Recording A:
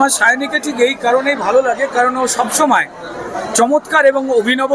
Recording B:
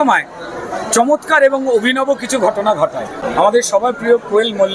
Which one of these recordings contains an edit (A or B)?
B